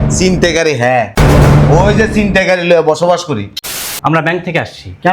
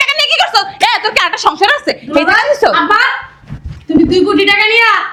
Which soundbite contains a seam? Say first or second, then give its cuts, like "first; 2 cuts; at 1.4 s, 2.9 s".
first; 1 cut; at 3.8 s